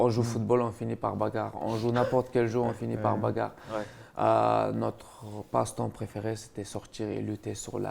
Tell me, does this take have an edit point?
no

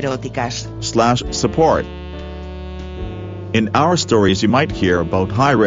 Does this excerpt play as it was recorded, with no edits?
yes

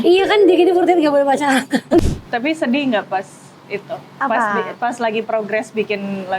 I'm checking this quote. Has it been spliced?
yes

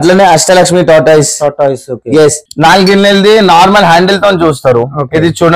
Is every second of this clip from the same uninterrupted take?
no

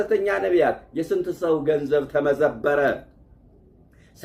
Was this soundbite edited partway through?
no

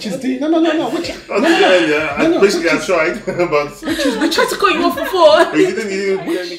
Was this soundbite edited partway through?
no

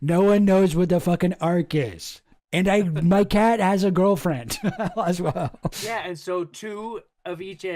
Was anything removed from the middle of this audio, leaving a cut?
yes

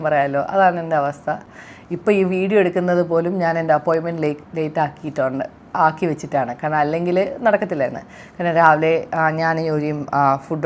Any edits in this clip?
no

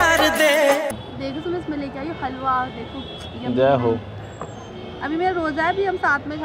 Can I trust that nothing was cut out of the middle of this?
yes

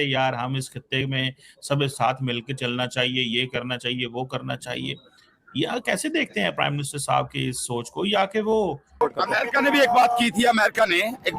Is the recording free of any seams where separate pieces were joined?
no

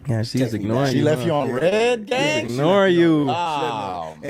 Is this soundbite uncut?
yes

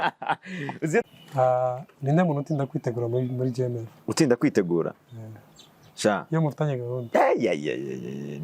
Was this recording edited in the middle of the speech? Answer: yes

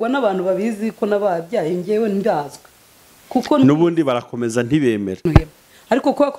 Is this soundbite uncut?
no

